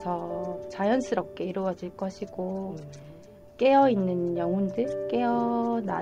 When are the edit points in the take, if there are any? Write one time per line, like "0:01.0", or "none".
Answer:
0:03.4